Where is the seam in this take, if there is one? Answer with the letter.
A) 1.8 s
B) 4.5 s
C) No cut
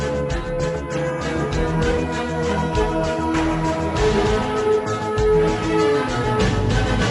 B